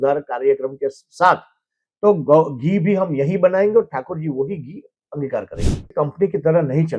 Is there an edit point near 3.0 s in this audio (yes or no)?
no